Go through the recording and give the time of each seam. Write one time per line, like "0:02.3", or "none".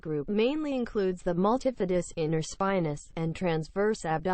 none